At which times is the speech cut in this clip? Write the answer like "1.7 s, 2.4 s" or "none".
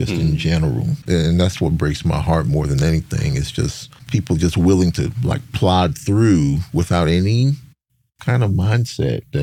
1.0 s, 4.0 s